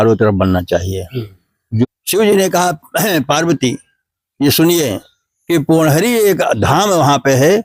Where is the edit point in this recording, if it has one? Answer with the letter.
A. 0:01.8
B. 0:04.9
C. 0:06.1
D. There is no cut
A